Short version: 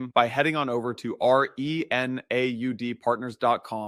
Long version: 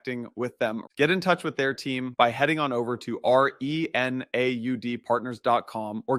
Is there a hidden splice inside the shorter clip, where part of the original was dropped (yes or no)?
no